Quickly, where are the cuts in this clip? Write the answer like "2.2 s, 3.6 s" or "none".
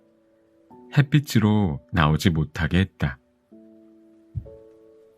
none